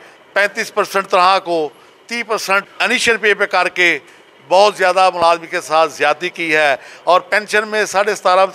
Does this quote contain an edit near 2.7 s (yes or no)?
yes